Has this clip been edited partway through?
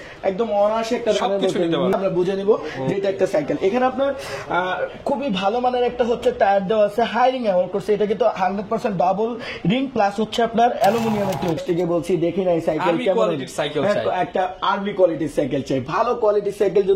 yes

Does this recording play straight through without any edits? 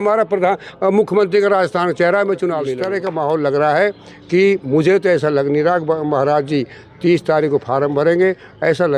no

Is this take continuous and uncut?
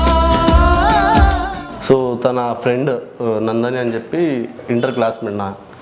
yes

